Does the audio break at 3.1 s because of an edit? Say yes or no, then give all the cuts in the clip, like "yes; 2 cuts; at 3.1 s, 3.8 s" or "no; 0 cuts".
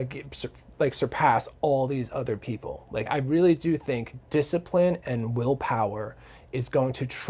yes; 1 cut; at 3.1 s